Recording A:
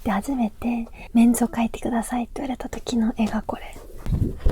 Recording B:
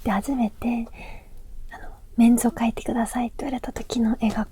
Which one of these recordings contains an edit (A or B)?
A